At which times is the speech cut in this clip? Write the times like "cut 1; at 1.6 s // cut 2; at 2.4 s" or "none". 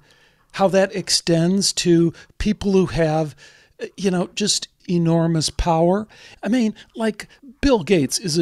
cut 1; at 4.8 s // cut 2; at 6.3 s // cut 3; at 7.4 s